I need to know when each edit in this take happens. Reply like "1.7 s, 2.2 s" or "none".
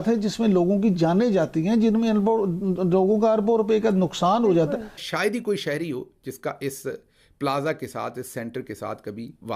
4.9 s